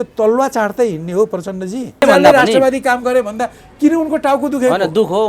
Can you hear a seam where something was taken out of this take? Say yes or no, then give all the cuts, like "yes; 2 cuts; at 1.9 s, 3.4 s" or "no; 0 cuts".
yes; 1 cut; at 2.0 s